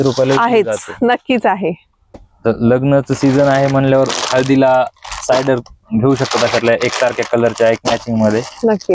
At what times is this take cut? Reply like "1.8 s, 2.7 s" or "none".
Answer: 2.3 s